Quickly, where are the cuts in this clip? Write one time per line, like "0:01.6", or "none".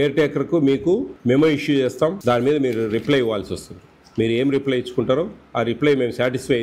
0:01.1
0:02.2

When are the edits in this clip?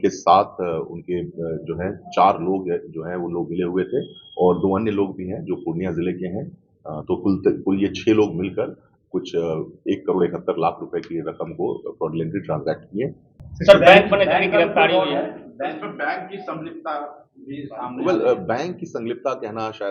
0:13.4

